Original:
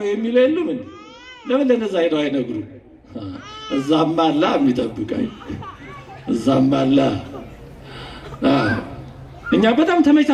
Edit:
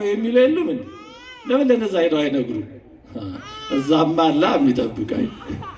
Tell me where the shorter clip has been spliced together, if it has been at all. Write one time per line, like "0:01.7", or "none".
none